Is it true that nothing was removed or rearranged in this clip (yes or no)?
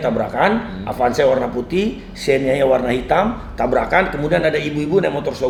yes